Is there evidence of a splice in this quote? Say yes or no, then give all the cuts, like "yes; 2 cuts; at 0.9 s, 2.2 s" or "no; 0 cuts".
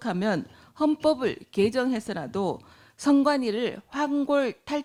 no; 0 cuts